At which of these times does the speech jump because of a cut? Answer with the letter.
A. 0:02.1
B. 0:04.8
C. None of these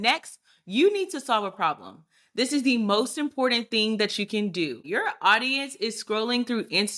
B